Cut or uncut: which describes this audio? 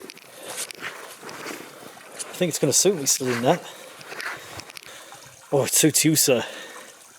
cut